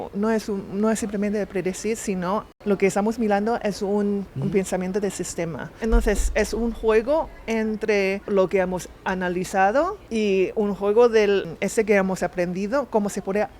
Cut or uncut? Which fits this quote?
cut